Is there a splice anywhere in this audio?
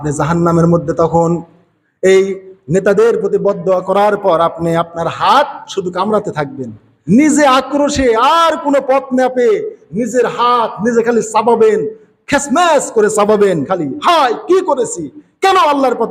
yes; 1 cut; at 13.7 s

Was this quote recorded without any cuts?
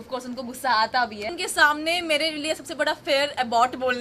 no; 1 cut; at 1.3 s

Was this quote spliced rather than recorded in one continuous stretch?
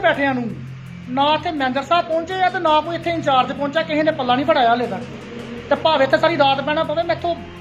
no; 0 cuts

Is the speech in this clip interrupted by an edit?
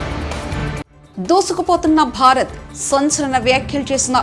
yes; 1 cut; at 0.9 s

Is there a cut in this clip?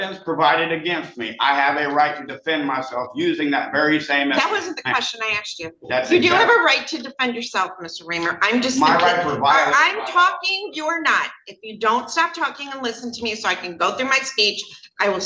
no; 0 cuts

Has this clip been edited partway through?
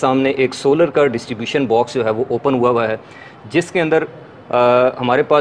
no; 0 cuts

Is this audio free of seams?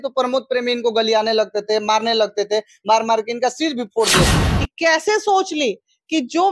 no; 1 cut; at 4.3 s

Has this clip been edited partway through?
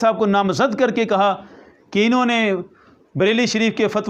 no; 0 cuts

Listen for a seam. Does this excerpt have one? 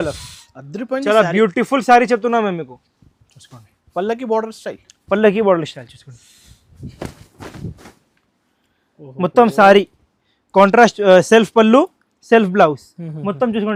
no; 0 cuts

